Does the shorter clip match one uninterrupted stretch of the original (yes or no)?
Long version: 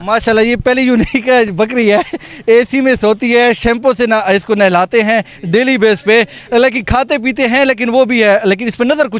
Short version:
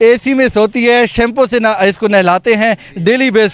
yes